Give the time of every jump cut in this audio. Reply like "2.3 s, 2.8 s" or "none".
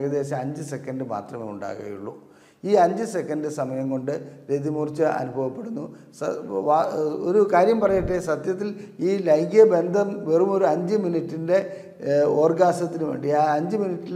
none